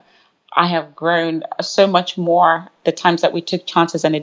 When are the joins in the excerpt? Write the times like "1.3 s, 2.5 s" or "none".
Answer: 2.7 s